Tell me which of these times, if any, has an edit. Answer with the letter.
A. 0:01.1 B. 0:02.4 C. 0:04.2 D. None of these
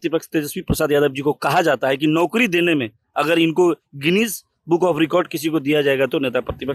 D